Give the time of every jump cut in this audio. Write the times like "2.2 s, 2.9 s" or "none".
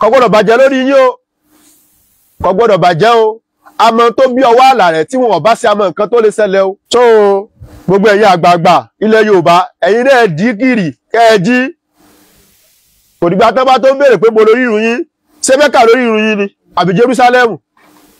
none